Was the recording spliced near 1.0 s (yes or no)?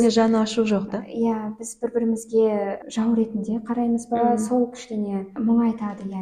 no